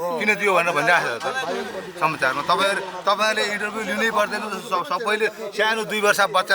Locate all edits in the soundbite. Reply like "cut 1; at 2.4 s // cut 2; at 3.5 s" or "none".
none